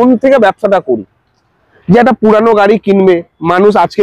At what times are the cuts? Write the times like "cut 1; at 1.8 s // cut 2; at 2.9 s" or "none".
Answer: none